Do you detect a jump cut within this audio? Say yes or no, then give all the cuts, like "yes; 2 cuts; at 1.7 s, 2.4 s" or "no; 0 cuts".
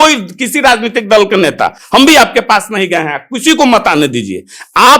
no; 0 cuts